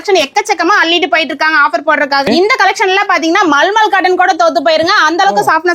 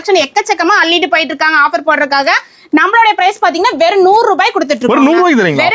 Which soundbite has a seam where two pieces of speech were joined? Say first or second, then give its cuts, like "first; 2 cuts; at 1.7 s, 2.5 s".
first; 1 cut; at 2.3 s